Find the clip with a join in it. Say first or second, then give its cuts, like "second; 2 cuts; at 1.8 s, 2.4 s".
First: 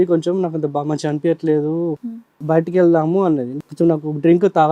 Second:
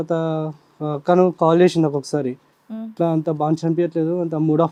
first; 2 cuts; at 2.3 s, 3.5 s